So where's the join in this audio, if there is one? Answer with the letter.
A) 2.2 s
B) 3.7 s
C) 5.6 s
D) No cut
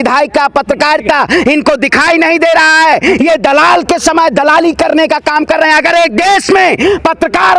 D